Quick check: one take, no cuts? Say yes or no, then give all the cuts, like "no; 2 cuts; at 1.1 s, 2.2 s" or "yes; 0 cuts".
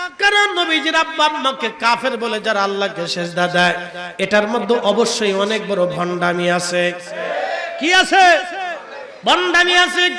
no; 1 cut; at 7.2 s